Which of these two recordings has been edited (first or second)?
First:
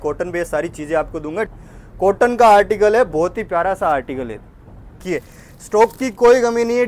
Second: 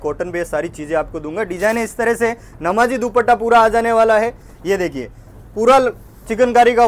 first